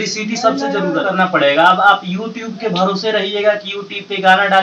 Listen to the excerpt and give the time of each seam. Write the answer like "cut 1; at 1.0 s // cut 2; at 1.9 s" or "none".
cut 1; at 1.0 s